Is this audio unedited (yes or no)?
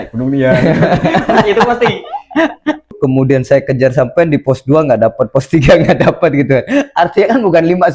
no